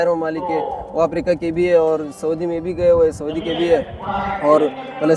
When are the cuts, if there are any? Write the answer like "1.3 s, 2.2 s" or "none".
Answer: none